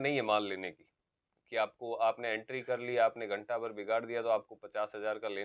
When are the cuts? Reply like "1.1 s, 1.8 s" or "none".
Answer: none